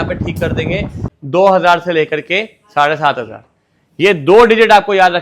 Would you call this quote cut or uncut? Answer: cut